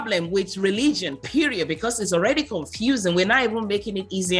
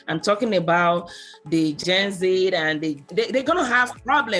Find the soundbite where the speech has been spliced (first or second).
second